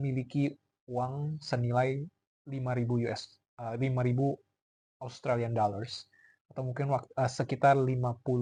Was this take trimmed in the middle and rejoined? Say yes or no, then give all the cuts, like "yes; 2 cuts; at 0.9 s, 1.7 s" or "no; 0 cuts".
no; 0 cuts